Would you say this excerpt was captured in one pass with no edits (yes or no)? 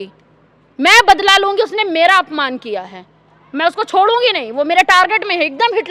yes